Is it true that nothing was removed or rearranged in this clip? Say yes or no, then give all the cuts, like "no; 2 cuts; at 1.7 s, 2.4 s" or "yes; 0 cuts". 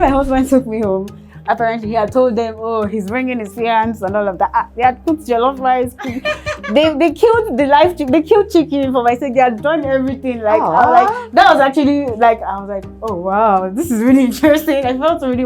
yes; 0 cuts